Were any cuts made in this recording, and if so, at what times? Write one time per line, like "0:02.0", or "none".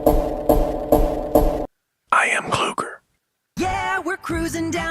0:01.6